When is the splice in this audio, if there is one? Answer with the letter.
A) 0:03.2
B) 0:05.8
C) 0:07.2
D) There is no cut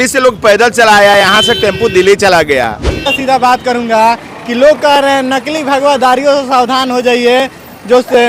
A